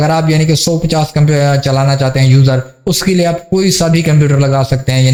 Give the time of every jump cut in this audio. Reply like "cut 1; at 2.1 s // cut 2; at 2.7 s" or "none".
none